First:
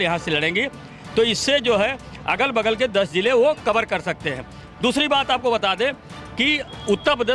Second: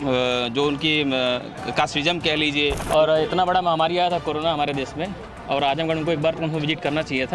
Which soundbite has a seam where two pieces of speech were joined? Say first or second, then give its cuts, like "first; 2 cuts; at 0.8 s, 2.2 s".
second; 1 cut; at 2.8 s